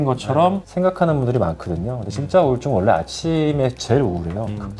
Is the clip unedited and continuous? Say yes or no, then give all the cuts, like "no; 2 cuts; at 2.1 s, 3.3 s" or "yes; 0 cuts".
yes; 0 cuts